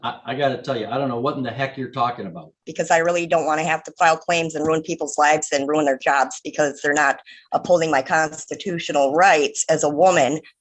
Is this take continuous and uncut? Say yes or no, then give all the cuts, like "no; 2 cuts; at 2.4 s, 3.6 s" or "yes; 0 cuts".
no; 1 cut; at 2.7 s